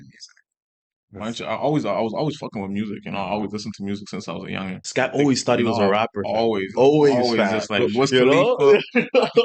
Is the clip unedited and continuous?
no; 1 cut; at 4.8 s

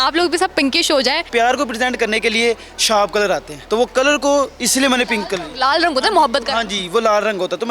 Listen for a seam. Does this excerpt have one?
yes; 2 cuts; at 1.3 s, 3.5 s

